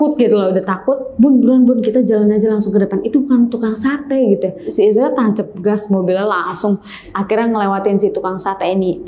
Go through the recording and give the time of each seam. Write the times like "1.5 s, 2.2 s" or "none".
7.1 s